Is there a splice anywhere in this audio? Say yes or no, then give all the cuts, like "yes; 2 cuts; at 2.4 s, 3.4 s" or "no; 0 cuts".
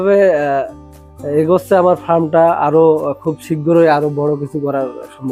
no; 0 cuts